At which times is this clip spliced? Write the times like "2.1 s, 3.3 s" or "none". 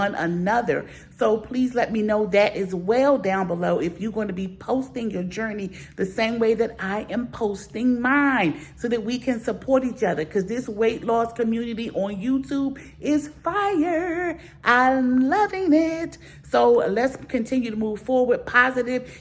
none